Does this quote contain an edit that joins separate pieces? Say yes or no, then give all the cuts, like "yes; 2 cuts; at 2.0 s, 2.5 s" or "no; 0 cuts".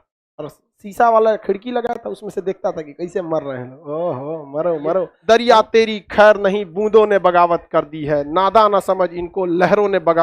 yes; 1 cut; at 5.1 s